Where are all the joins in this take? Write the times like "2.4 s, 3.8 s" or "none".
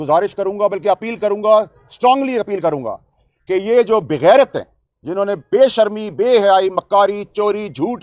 none